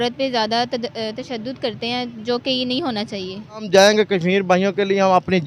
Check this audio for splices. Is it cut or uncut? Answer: cut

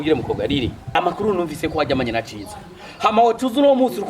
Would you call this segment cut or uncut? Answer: cut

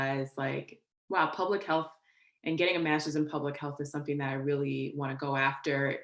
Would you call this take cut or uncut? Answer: uncut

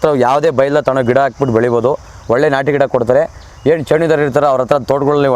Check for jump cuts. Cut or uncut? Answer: uncut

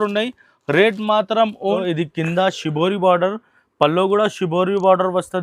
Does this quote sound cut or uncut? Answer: cut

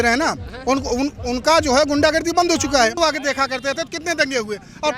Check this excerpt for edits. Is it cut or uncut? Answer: cut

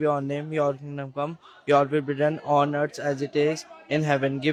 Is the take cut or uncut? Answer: uncut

